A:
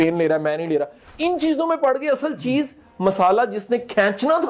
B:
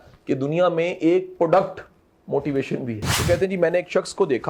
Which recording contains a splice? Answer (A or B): B